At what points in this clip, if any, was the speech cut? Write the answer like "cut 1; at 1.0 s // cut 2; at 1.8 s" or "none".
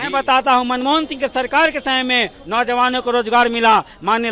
none

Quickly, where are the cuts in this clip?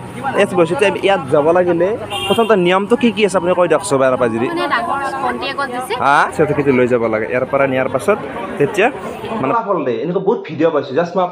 cut 1; at 6.3 s // cut 2; at 9.5 s

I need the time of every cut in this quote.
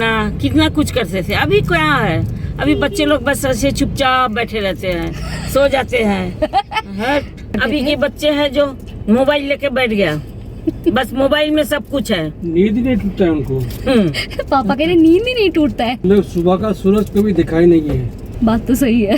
cut 1; at 7.6 s // cut 2; at 16.0 s // cut 3; at 18.2 s

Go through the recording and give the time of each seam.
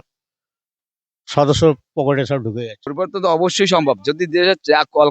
cut 1; at 2.8 s

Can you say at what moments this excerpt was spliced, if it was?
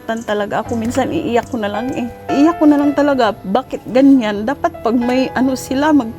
cut 1; at 2.3 s

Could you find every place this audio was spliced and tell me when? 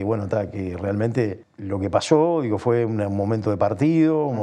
cut 1; at 1.5 s

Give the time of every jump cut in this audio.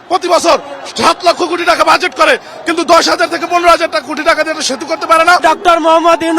cut 1; at 5.4 s

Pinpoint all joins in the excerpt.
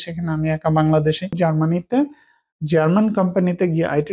cut 1; at 1.4 s

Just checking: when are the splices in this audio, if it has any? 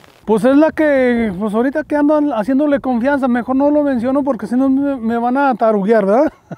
none

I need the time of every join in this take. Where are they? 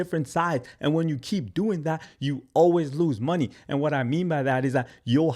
none

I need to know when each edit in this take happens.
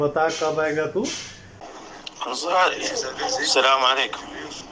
cut 1; at 1.6 s

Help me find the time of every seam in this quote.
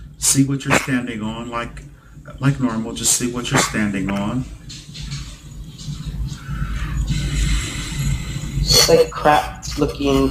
none

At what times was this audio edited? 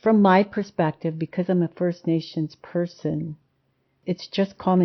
cut 1; at 3.9 s

